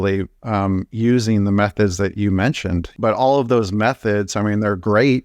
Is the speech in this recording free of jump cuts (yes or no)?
no